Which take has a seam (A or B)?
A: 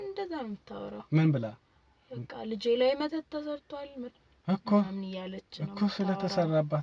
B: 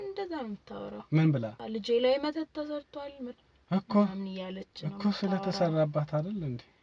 B